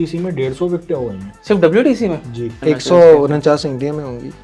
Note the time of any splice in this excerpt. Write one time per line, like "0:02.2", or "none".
0:01.3
0:02.5